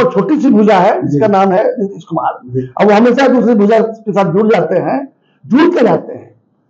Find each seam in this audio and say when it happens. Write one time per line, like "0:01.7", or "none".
none